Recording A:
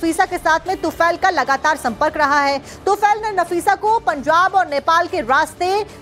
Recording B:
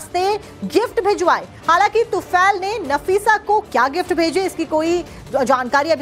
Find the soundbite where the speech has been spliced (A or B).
A